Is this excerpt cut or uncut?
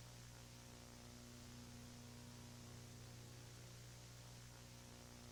uncut